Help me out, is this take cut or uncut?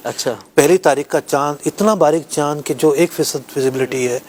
uncut